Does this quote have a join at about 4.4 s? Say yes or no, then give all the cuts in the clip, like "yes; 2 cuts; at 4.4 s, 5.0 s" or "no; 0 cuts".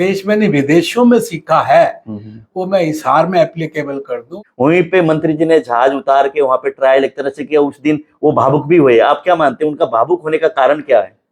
yes; 1 cut; at 4.4 s